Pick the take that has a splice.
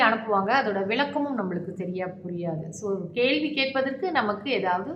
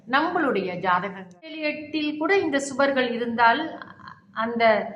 second; 1 cut; at 1.6 s

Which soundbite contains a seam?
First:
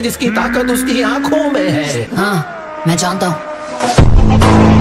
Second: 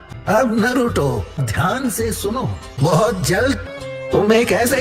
second; 1 cut; at 3.6 s

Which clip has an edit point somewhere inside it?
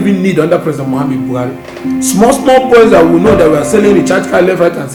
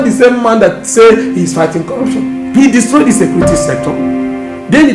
second; 1 cut; at 2.0 s

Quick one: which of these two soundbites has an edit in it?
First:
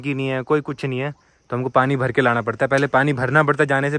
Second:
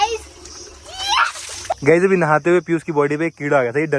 second; 1 cut; at 1.7 s

